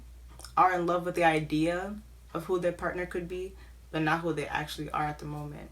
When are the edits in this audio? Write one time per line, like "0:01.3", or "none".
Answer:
none